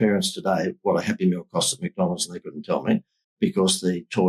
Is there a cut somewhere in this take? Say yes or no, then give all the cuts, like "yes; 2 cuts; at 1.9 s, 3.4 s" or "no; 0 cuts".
no; 0 cuts